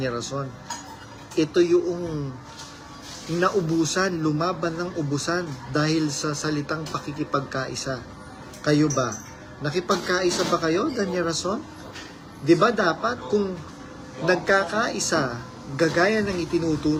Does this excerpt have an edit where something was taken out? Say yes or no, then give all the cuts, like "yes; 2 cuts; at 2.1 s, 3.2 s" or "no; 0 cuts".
no; 0 cuts